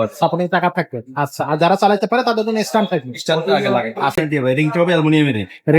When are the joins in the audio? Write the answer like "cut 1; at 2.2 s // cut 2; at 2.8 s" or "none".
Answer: cut 1; at 4.2 s